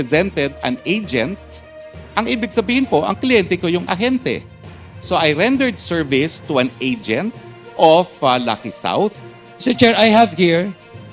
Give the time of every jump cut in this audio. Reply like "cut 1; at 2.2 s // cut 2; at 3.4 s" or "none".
none